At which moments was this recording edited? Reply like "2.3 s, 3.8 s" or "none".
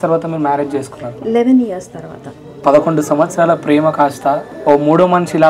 2.6 s, 4.5 s